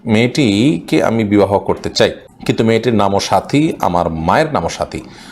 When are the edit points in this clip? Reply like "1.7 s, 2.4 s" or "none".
2.3 s